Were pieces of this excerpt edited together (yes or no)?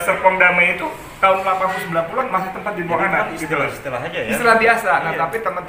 no